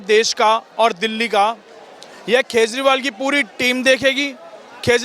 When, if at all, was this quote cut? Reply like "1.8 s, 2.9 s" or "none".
none